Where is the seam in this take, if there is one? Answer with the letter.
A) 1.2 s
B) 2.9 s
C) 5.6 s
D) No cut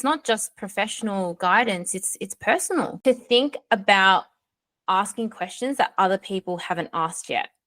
B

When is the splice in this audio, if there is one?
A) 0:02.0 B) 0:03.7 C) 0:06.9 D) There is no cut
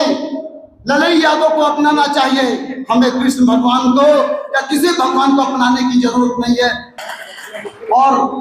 C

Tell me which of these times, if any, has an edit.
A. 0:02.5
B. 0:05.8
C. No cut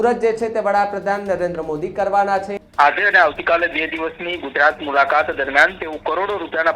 A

